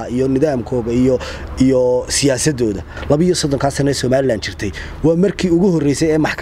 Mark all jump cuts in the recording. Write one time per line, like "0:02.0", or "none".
0:02.9